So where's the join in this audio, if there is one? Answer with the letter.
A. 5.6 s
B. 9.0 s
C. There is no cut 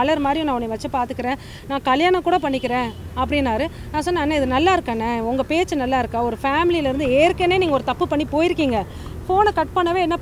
B